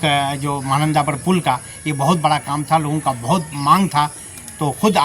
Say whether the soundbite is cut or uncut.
uncut